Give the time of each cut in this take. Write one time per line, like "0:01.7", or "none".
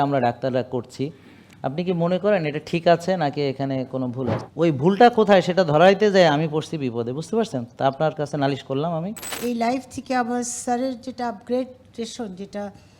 0:04.4
0:09.3